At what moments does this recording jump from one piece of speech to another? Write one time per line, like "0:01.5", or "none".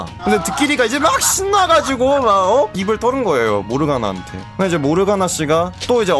0:02.8